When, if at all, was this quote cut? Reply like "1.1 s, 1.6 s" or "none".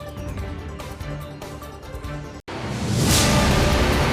2.0 s